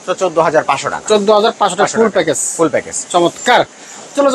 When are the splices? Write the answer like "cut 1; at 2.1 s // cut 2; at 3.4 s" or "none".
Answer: none